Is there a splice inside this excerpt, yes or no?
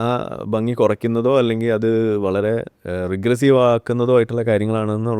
no